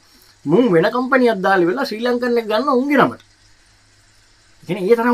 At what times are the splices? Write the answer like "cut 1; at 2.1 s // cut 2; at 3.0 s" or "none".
none